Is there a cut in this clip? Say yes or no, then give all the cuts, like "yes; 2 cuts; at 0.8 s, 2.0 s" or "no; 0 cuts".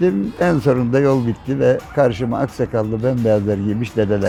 no; 0 cuts